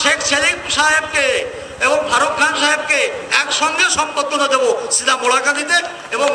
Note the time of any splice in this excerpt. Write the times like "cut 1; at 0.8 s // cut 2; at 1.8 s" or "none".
none